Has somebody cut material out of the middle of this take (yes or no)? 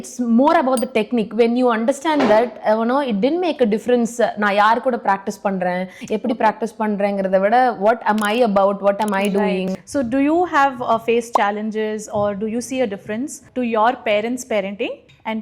yes